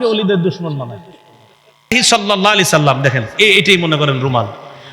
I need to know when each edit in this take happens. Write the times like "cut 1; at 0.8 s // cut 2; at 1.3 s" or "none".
cut 1; at 1.9 s